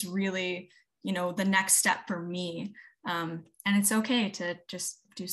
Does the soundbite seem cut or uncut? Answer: uncut